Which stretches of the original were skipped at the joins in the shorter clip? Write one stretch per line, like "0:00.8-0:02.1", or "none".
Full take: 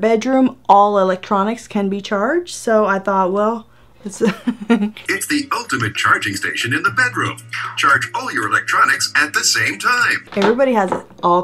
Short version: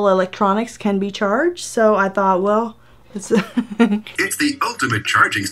none